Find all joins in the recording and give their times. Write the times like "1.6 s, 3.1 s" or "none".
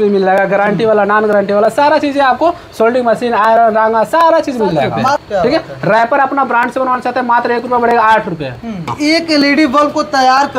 5.2 s, 8.9 s